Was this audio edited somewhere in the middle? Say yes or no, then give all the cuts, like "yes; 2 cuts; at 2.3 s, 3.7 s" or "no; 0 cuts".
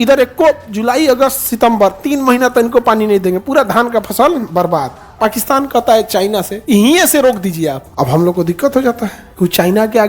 yes; 4 cuts; at 4.9 s, 6.5 s, 7.9 s, 9.2 s